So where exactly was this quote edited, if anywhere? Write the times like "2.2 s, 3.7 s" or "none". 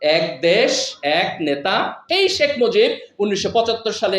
2.0 s